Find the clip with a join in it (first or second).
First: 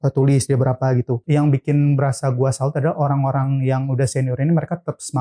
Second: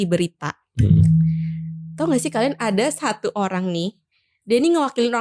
first